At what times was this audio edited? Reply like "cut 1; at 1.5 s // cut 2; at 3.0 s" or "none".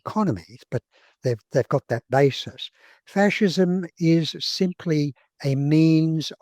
none